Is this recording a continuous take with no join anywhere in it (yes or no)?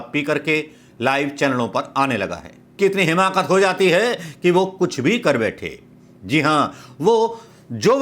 no